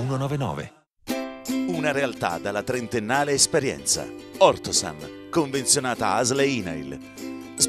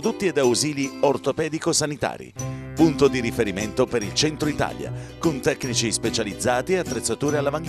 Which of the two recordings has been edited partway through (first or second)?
first